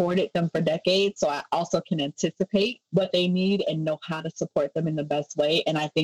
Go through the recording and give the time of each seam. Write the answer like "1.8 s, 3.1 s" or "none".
2.8 s